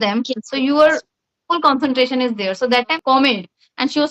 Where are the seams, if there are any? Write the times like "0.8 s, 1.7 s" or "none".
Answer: 3.0 s